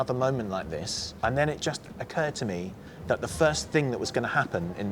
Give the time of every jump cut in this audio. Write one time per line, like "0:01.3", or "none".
0:01.2
0:01.9
0:02.9

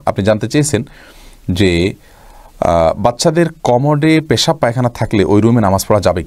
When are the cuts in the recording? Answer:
none

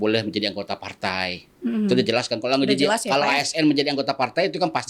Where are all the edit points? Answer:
none

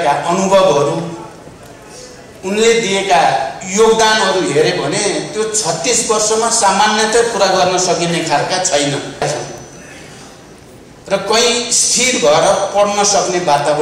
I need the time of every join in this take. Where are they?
0:09.2

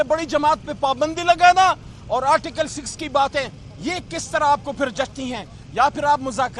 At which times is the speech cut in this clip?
none

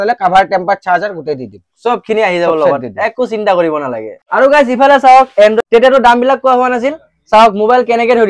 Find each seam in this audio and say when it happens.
none

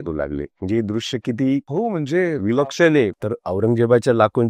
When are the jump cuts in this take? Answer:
0:01.7
0:03.1

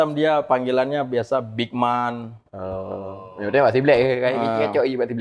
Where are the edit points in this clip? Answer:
none

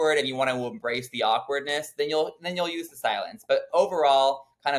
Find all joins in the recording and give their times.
none

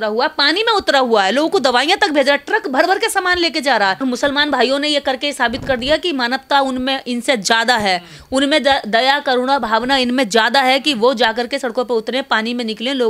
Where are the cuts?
0:04.0

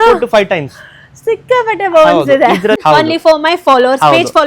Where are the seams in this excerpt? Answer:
0:02.8

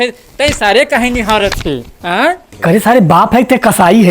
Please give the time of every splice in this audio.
0:02.5

